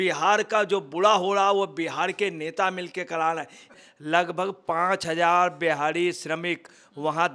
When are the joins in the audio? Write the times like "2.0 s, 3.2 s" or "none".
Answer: 3.8 s